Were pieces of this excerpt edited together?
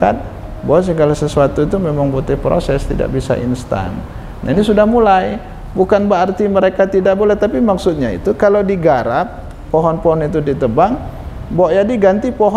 no; 0 cuts

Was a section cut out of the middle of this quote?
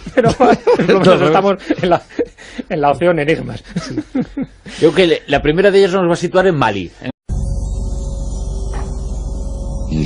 no; 0 cuts

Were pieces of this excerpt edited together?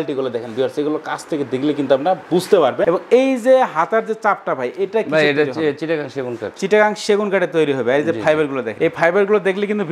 no; 0 cuts

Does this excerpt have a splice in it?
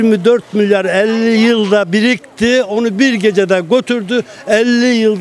no; 0 cuts

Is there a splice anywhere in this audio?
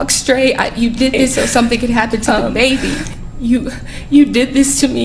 yes; 1 cut; at 3.2 s

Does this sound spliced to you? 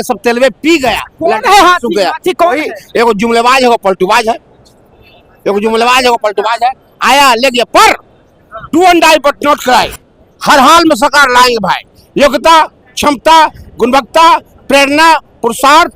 no; 0 cuts

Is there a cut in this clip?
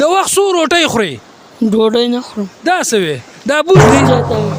no; 0 cuts

